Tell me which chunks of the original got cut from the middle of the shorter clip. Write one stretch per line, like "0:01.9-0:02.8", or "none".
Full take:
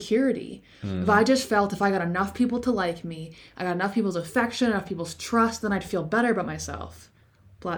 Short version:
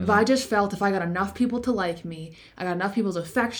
none